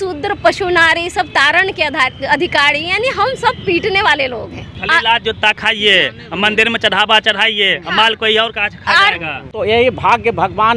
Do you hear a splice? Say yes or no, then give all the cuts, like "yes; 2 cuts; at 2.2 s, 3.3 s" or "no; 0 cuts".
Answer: yes; 2 cuts; at 4.6 s, 9.5 s